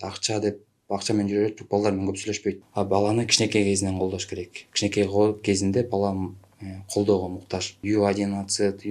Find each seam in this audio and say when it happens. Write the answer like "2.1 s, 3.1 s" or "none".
2.6 s, 7.8 s